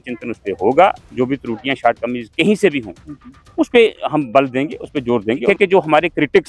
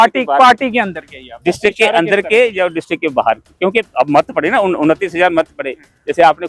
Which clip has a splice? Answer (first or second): first